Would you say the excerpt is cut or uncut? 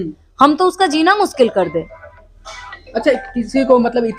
uncut